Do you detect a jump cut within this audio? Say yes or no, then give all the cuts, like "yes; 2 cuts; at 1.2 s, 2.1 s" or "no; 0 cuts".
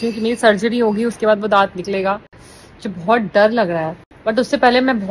no; 0 cuts